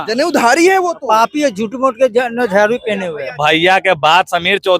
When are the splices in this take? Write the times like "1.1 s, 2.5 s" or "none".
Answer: 3.4 s